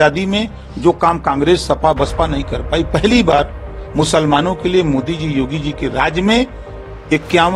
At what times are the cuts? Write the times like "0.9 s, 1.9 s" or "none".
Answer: none